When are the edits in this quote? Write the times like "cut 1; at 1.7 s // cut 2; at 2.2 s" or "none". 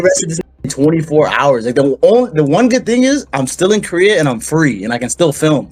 none